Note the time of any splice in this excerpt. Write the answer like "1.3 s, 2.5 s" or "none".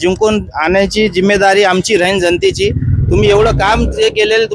none

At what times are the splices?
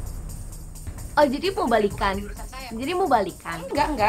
1.0 s

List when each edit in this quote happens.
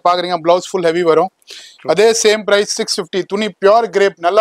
none

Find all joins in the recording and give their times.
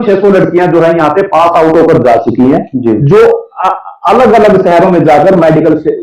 none

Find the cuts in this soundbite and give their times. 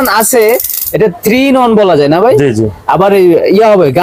none

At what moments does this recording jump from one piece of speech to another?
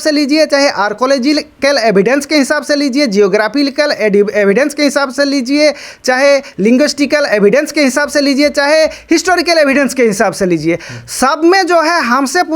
none

